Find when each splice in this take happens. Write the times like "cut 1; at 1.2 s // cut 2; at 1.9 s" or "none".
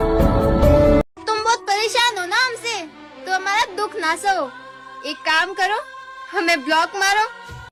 none